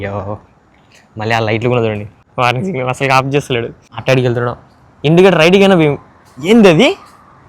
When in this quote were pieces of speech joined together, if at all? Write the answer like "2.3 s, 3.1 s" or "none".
2.2 s, 3.8 s